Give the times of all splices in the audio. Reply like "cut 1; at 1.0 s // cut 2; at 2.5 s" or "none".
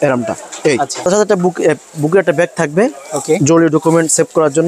cut 1; at 1.0 s